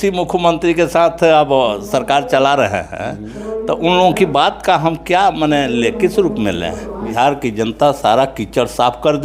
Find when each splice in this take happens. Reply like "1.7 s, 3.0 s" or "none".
7.1 s